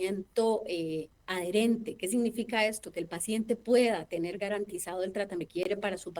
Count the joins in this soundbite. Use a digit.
2